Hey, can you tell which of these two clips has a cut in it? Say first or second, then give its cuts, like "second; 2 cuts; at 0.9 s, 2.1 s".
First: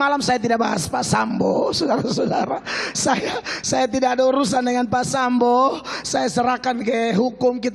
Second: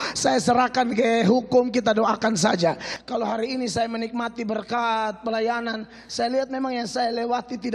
second; 1 cut; at 2.9 s